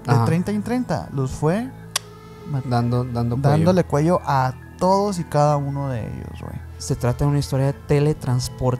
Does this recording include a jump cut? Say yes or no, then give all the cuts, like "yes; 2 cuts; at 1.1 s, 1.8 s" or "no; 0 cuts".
yes; 1 cut; at 6.8 s